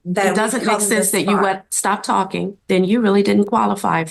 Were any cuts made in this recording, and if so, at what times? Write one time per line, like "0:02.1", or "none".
0:02.5